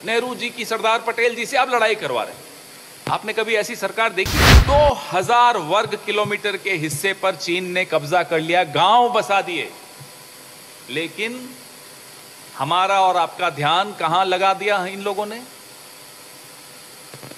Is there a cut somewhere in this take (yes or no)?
yes